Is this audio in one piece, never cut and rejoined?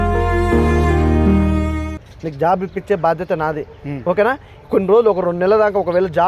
no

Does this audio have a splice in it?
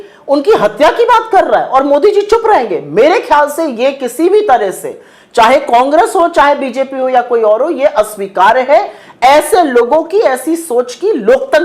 no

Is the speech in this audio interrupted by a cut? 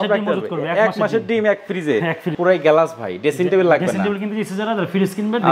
yes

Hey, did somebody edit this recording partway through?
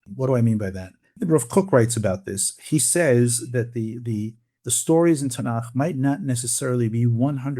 yes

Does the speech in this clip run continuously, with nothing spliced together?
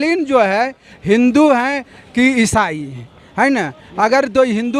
yes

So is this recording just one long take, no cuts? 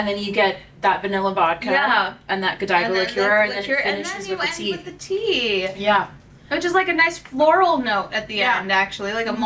yes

